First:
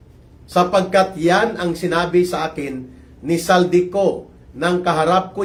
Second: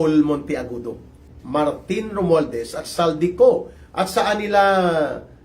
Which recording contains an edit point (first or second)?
second